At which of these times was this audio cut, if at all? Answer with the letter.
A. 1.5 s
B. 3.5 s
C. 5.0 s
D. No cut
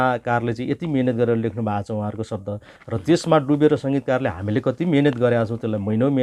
D